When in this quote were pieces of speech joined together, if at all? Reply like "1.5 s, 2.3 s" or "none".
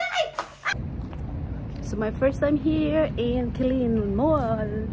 1.0 s